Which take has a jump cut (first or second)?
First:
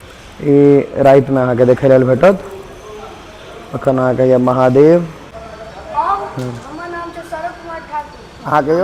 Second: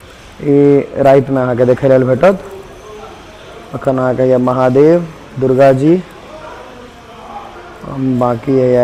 first